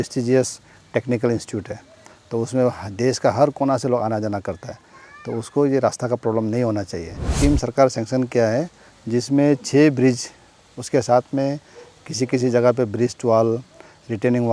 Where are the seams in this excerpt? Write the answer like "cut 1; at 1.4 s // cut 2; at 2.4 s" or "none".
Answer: cut 1; at 7.3 s